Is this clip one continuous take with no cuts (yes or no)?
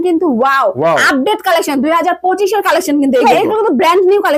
no